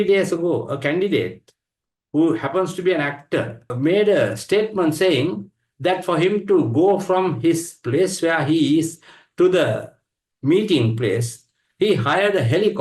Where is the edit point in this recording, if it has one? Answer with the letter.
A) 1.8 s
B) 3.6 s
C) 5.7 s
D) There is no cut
B